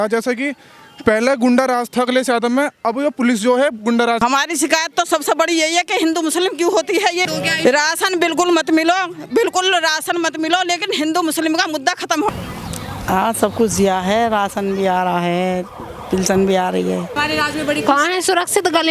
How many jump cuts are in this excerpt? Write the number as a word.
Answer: four